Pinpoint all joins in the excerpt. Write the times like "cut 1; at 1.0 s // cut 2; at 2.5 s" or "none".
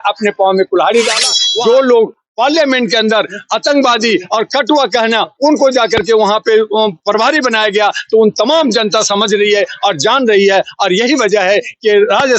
cut 1; at 1.5 s